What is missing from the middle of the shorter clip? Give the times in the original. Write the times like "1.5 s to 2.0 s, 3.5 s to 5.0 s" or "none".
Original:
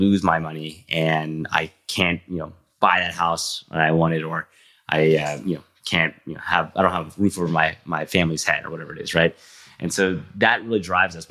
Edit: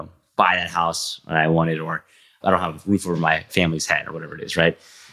4.8 s to 6.7 s, 7.8 s to 8.1 s